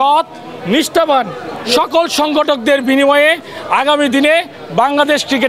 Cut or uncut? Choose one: uncut